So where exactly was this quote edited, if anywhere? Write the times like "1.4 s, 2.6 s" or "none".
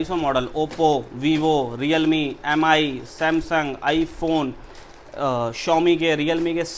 none